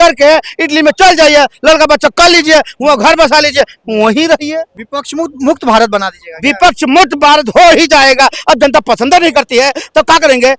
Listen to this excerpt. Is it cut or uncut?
uncut